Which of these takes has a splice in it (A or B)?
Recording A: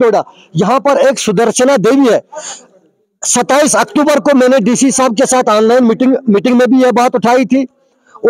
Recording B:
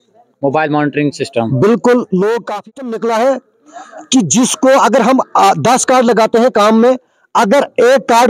B